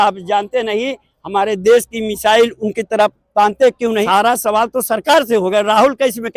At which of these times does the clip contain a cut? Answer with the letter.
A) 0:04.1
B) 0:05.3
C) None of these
A